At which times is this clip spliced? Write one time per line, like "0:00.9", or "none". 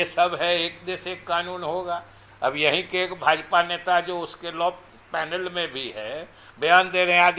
none